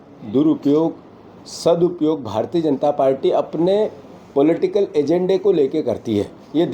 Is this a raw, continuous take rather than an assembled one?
yes; 0 cuts

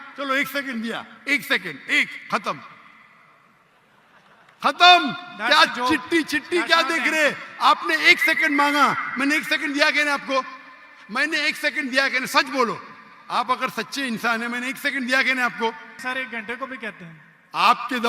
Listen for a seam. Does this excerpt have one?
yes; 1 cut; at 15.9 s

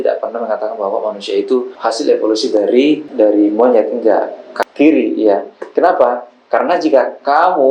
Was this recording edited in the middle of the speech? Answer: yes; 2 cuts; at 1.7 s, 4.6 s

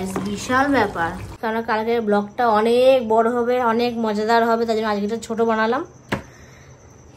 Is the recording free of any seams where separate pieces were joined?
no; 1 cut; at 1.4 s

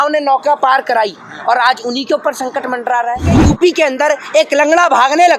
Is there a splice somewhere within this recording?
yes; 1 cut; at 3.4 s

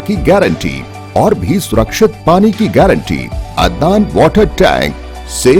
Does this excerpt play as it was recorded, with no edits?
no; 1 cut; at 3.4 s

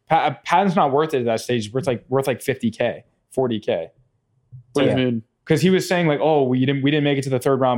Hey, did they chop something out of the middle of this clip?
no; 0 cuts

